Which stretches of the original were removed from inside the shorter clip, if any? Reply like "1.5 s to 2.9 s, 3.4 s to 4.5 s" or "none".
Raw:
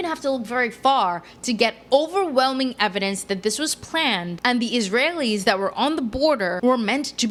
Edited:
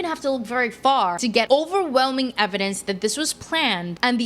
1.4 s to 1.8 s